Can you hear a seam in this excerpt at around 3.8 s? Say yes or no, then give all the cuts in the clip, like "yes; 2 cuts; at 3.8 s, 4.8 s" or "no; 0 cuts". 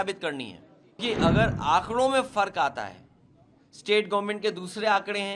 no; 1 cut; at 1.0 s